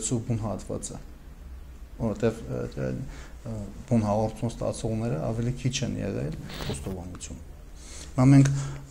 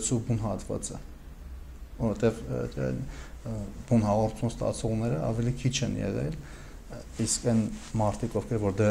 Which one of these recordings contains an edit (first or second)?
first